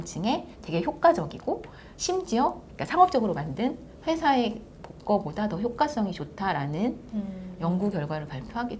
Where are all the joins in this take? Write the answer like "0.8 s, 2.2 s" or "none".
none